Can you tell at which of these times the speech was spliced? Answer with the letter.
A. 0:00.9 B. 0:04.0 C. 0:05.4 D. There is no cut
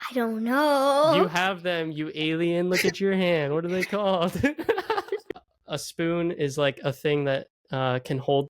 C